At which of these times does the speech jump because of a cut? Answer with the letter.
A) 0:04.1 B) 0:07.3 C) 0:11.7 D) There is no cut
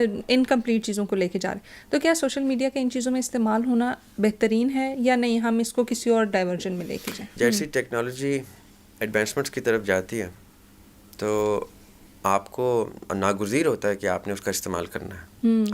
B